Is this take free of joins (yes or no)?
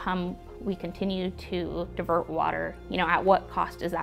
yes